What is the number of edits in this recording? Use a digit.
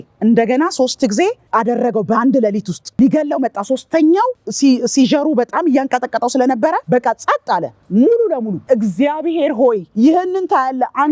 5